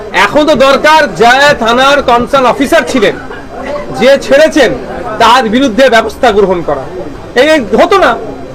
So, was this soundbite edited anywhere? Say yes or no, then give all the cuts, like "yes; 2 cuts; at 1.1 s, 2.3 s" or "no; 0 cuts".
no; 0 cuts